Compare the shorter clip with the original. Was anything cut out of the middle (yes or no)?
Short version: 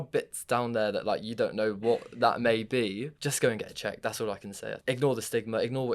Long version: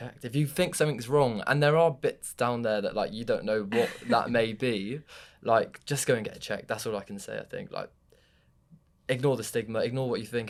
yes